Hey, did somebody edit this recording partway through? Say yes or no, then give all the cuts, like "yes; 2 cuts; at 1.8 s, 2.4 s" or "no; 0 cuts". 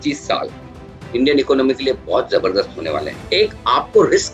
yes; 1 cut; at 3.1 s